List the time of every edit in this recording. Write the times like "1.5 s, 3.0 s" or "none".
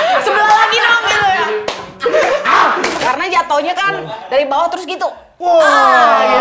3.0 s